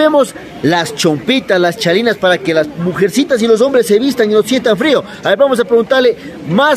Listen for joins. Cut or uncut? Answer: uncut